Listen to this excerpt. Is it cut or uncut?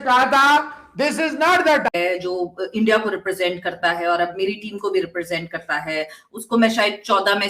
cut